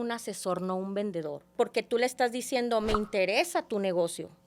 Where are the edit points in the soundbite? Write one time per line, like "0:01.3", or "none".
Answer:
0:01.5